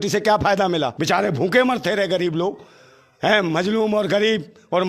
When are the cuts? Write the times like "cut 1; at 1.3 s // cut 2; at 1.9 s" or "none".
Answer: cut 1; at 1.0 s